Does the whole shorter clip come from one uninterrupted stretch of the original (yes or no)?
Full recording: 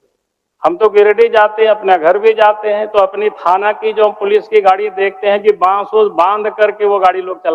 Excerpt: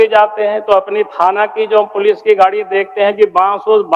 yes